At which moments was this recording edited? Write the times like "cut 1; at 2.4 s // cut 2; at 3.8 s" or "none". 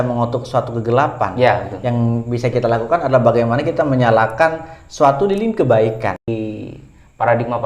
cut 1; at 6.2 s